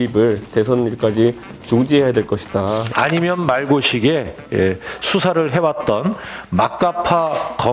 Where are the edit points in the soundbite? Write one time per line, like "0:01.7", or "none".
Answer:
0:02.9